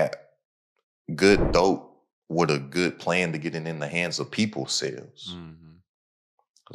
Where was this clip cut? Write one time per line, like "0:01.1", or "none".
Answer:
none